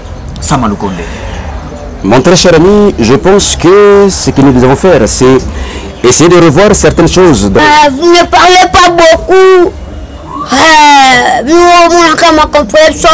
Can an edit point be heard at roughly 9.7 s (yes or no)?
no